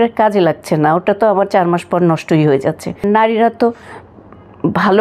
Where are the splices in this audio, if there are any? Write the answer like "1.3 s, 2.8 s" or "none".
3.0 s